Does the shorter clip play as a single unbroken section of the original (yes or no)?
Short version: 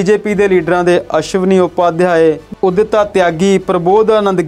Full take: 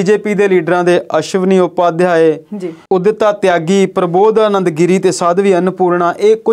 no